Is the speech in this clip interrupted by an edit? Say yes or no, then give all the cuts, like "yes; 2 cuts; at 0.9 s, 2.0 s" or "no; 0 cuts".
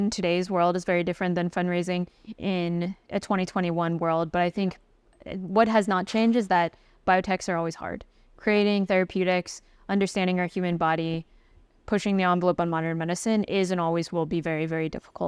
no; 0 cuts